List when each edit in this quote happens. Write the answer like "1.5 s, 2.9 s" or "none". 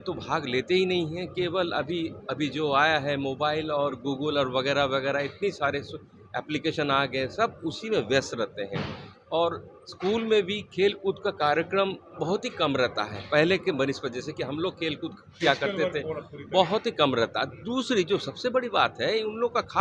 none